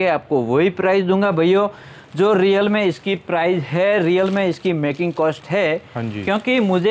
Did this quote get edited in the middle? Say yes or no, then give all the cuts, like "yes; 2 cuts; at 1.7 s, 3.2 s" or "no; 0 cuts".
no; 0 cuts